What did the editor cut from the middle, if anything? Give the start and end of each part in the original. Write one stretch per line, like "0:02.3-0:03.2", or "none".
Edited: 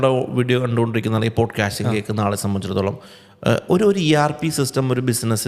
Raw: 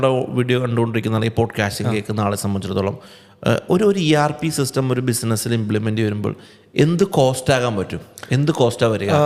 none